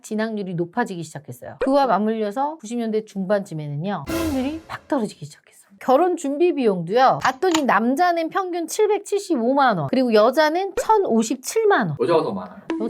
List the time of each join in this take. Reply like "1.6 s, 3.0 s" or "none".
4.7 s, 5.8 s